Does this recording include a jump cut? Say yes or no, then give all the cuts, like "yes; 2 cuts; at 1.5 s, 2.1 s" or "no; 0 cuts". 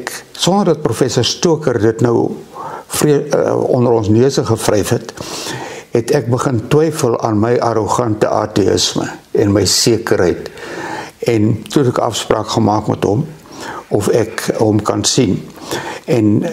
no; 0 cuts